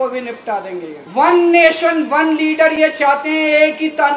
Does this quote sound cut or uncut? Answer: cut